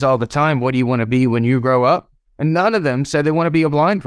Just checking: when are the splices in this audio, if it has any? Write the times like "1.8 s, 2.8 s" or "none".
none